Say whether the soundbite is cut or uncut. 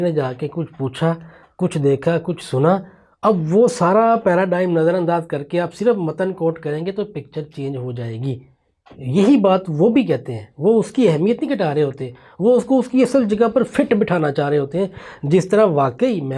uncut